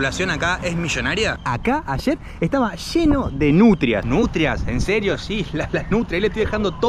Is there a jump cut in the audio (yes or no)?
yes